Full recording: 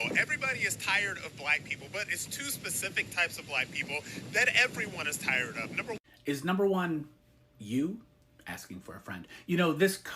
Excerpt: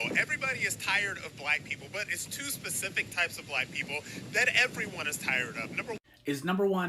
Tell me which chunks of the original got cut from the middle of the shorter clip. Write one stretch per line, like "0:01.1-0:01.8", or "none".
none